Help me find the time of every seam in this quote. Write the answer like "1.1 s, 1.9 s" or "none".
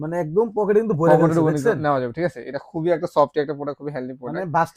none

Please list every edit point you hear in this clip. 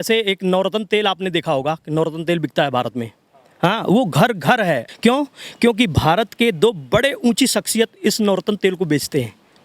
4.9 s

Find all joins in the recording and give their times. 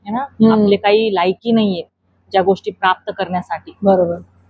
none

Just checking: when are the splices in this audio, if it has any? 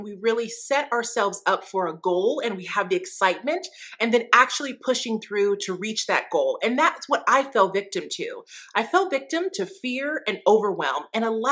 none

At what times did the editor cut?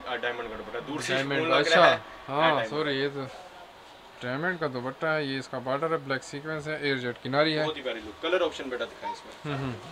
none

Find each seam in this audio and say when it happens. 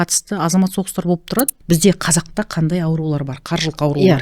1.6 s

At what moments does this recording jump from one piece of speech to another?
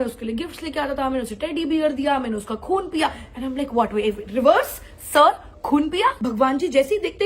6.2 s

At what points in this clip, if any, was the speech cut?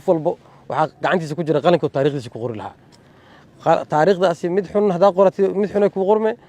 none

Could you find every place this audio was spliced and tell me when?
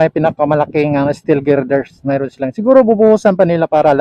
none

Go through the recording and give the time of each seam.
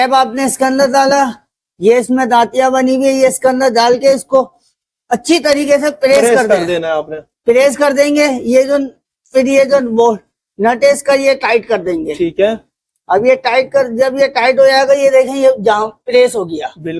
none

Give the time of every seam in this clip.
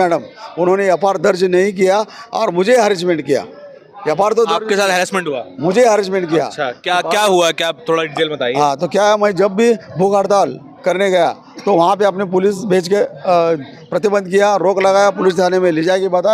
none

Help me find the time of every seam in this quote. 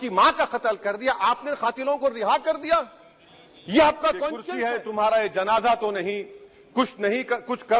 4.4 s

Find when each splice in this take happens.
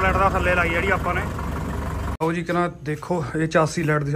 2.0 s

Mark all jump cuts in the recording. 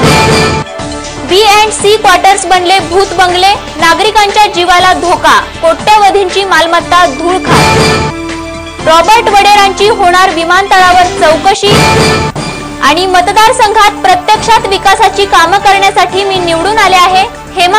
none

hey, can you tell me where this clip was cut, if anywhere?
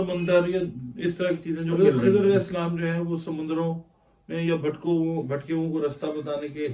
1.9 s

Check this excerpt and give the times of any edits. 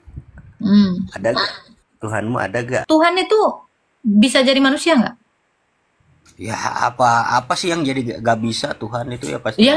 2.8 s

